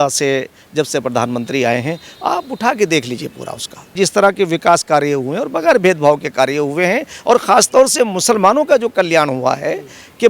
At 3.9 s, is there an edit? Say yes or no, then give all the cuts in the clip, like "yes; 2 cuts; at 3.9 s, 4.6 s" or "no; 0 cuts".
yes; 1 cut; at 3.9 s